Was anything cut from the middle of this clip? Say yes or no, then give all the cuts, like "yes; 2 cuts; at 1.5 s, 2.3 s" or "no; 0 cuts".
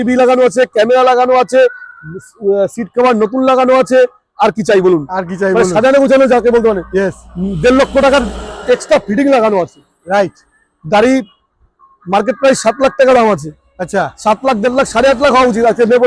no; 0 cuts